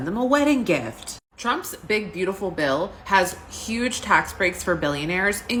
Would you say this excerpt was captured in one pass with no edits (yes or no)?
yes